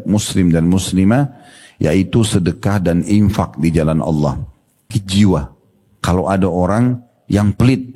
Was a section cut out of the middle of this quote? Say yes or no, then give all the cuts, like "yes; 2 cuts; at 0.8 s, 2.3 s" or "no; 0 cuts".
yes; 1 cut; at 5.0 s